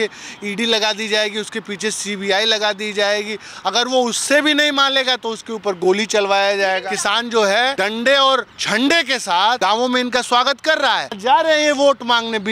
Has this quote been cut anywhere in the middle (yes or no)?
yes